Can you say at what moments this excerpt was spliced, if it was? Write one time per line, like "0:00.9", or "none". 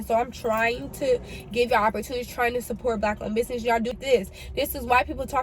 0:04.0